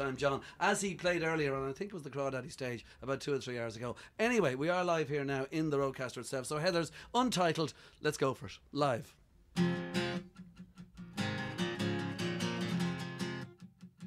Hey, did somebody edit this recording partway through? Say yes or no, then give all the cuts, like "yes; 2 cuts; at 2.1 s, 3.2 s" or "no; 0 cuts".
no; 0 cuts